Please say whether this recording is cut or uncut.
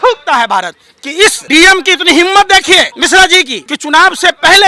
cut